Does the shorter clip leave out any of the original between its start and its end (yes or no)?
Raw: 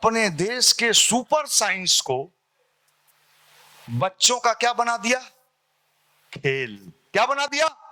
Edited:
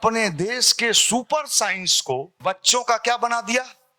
yes